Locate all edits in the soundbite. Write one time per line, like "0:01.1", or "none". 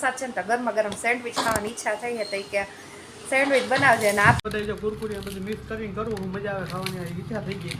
0:04.4